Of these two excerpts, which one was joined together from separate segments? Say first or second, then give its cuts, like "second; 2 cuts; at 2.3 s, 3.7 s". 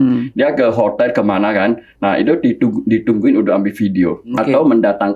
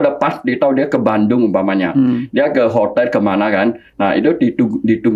first; 1 cut; at 4.3 s